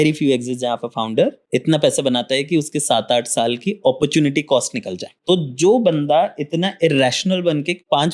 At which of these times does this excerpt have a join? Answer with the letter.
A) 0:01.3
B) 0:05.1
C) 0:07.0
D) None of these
B